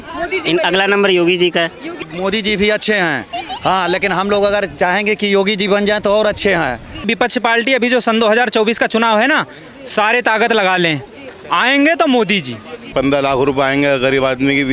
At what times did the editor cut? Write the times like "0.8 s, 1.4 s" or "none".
2.0 s, 7.1 s, 12.9 s